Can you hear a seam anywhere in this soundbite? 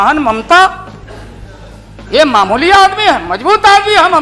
no; 0 cuts

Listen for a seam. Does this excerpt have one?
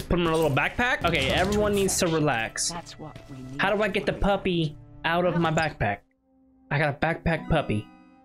yes; 1 cut; at 1.0 s

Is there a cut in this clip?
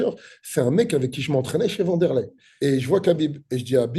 yes; 1 cut; at 2.4 s

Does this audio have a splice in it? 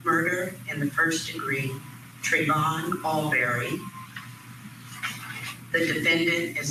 no; 0 cuts

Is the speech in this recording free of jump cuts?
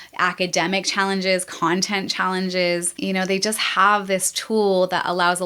no; 1 cut; at 2.9 s

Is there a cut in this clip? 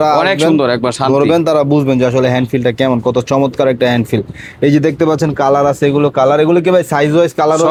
no; 0 cuts

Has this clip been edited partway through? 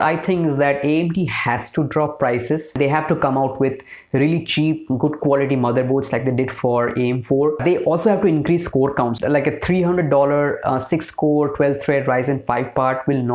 yes; 3 cuts; at 2.7 s, 7.6 s, 9.1 s

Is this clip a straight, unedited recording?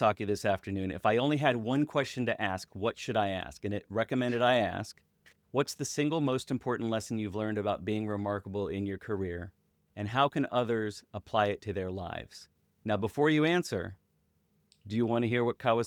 yes; 0 cuts

